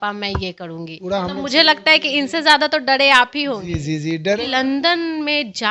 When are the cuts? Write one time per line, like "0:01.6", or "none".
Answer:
0:00.9
0:04.4